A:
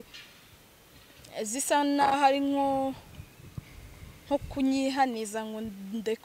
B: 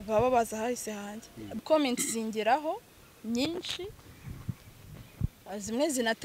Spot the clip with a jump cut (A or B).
B